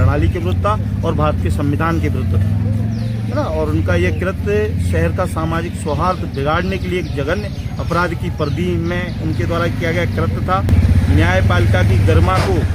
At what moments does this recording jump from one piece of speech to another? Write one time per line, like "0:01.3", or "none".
0:10.7

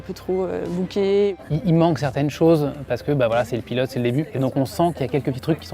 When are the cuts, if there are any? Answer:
0:01.4
0:04.3

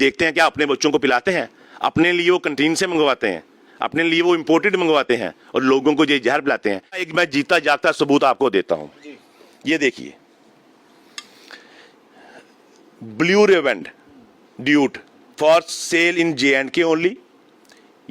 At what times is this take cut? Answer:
0:07.0

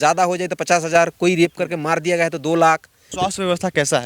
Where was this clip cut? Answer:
0:03.0

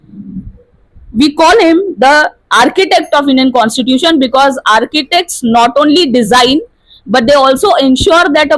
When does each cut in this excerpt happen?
none

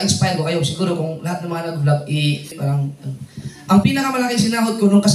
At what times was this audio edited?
0:02.6

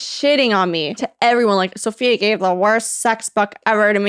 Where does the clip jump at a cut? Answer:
0:01.1

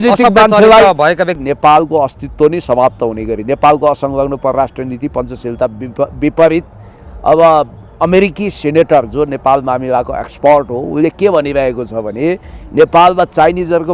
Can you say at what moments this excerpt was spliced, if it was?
0:01.4

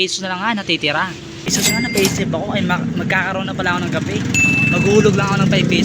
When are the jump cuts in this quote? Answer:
0:01.5

